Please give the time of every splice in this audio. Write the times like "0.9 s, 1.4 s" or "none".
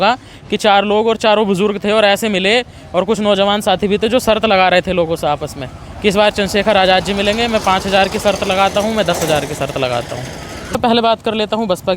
10.8 s